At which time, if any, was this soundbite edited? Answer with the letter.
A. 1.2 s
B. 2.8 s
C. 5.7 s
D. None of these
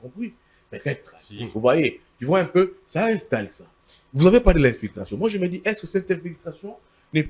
A